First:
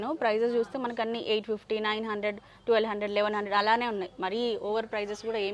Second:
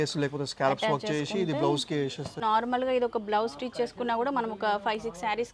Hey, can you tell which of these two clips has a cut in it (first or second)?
second